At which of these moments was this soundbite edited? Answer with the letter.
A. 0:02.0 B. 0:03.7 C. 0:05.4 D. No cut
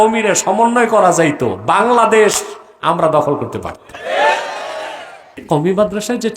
C